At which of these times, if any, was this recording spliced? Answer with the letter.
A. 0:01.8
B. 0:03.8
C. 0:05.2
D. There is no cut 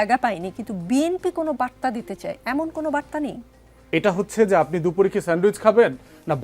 B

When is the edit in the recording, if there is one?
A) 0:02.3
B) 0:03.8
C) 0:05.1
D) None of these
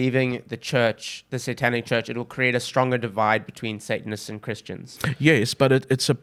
D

